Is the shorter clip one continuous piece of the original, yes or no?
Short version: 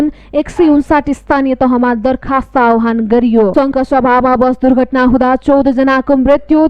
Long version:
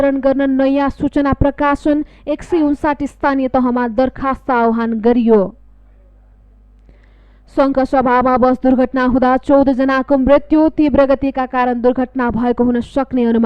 no